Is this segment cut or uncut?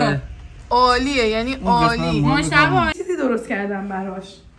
cut